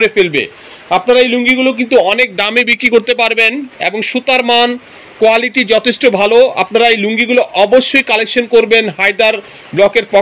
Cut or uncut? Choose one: uncut